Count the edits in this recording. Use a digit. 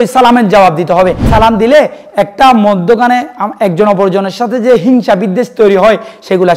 1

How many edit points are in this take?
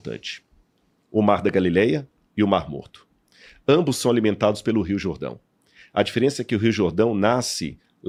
0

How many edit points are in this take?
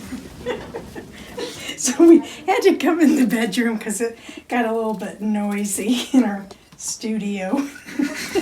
1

